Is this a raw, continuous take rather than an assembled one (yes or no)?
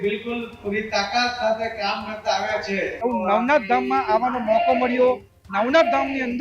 no